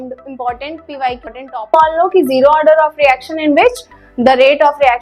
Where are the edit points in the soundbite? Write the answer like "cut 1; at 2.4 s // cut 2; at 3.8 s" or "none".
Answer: cut 1; at 1.2 s

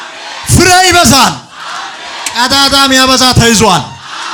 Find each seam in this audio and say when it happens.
none

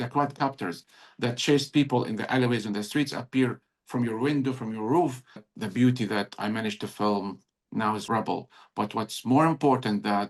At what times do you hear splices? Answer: cut 1; at 5.5 s // cut 2; at 8.0 s

